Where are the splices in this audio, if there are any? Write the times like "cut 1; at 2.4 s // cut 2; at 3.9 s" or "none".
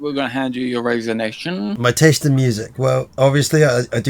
cut 1; at 1.8 s // cut 2; at 3.1 s